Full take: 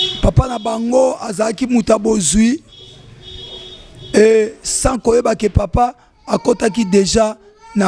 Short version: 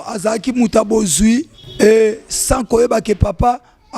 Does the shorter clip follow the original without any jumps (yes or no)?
no